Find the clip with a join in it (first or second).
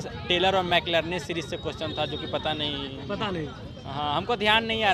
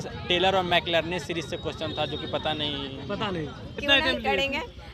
second